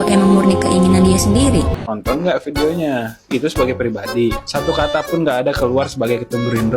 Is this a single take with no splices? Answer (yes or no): no